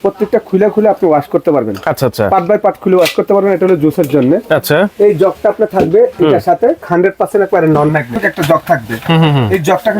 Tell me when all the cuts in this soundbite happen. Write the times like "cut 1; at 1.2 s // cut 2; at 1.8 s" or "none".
cut 1; at 6.9 s // cut 2; at 8.2 s